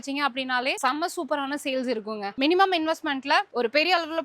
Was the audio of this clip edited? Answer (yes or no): yes